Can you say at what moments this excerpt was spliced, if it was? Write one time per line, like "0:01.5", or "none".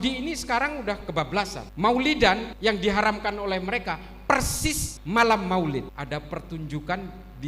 0:01.6
0:02.5
0:04.9
0:05.9